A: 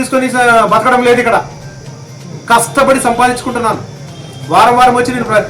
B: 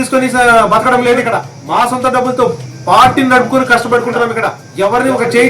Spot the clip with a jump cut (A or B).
B